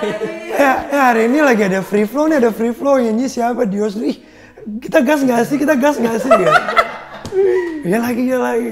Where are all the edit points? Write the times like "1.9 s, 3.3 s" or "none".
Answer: none